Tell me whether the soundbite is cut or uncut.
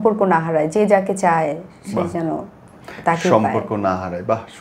uncut